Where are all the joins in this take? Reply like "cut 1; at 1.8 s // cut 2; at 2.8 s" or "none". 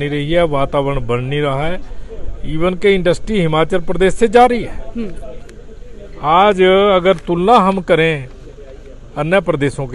none